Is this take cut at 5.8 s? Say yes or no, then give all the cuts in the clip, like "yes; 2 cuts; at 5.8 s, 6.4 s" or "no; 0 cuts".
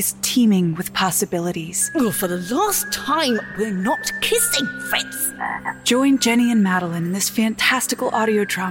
yes; 2 cuts; at 1.9 s, 5.8 s